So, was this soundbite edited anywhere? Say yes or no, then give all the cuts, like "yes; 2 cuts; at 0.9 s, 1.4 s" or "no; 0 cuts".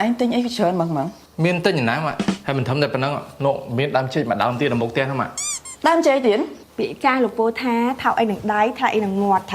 yes; 3 cuts; at 1.2 s, 2.4 s, 6.6 s